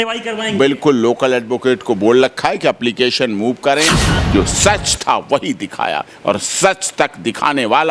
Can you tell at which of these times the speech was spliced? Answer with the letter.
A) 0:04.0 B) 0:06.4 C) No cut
A